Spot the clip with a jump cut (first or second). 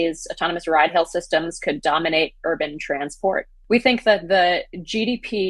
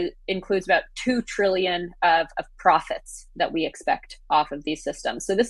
first